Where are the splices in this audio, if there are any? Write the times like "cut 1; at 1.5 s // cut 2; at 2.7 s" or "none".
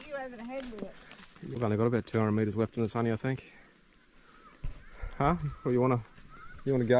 cut 1; at 1.4 s